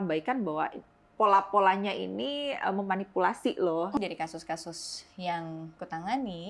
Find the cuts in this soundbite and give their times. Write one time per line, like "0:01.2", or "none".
0:03.9